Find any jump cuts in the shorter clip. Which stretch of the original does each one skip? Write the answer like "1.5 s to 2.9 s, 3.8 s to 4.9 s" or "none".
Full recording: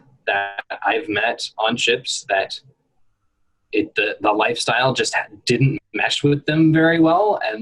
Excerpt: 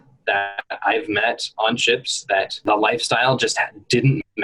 2.6 s to 4.2 s